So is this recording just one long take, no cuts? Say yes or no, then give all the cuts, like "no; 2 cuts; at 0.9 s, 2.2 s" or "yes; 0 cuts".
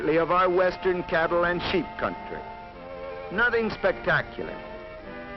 no; 1 cut; at 3.1 s